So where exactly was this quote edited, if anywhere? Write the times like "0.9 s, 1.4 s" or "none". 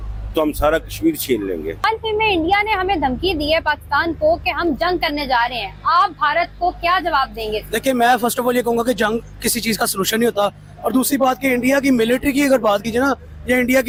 none